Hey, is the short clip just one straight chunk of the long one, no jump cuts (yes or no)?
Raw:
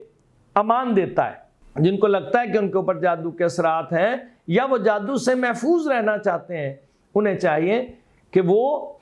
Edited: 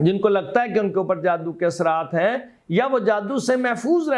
yes